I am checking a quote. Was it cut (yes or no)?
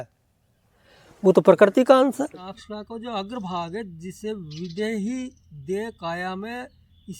yes